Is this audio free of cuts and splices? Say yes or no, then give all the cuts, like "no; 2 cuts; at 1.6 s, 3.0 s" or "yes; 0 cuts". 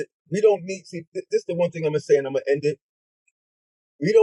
yes; 0 cuts